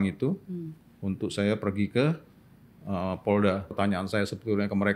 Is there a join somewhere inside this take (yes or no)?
yes